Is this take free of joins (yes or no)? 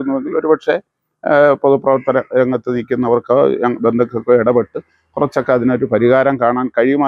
yes